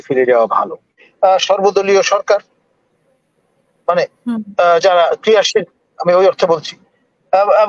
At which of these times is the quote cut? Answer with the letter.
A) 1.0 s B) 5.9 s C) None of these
A